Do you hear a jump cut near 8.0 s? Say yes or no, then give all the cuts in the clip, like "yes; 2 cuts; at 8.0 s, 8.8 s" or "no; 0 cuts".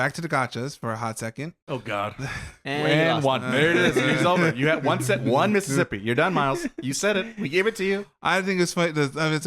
no; 2 cuts; at 1.6 s, 2.5 s